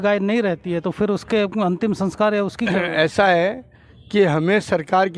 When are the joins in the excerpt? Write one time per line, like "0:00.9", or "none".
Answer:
none